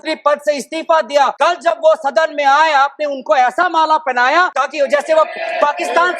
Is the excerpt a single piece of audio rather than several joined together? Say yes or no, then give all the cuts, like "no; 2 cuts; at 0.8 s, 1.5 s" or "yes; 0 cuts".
no; 2 cuts; at 1.3 s, 4.6 s